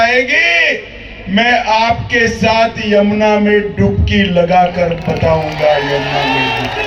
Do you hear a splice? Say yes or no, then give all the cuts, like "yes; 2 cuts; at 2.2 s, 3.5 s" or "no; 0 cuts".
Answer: no; 0 cuts